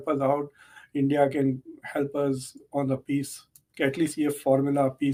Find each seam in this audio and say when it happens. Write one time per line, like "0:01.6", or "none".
none